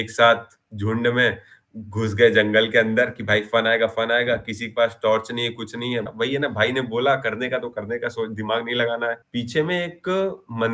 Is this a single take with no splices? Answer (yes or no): no